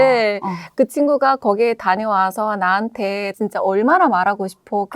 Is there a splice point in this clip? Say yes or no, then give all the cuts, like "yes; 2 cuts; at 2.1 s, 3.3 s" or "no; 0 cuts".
no; 0 cuts